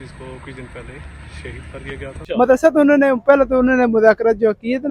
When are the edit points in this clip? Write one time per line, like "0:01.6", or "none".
0:02.2